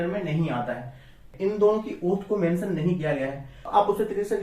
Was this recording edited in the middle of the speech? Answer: yes; 2 cuts; at 1.3 s, 3.5 s

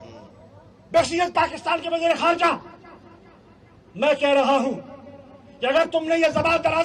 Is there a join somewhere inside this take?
no; 0 cuts

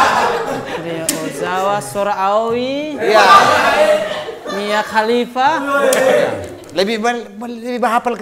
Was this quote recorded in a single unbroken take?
yes; 0 cuts

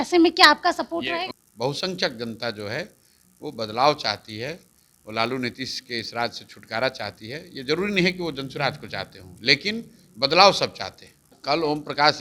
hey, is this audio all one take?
no; 2 cuts; at 1.4 s, 11.3 s

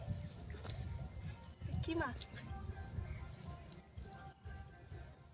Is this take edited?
yes; 1 cut; at 2.3 s

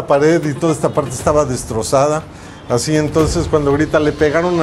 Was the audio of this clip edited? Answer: no; 0 cuts

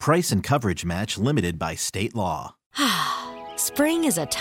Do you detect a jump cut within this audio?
yes; 1 cut; at 2.7 s

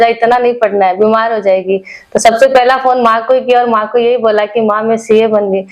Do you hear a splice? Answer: no; 0 cuts

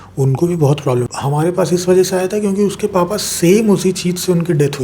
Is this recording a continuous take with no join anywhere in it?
no; 1 cut; at 1.1 s

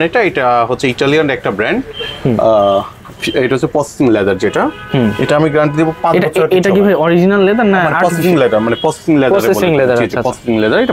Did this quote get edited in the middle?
no; 0 cuts

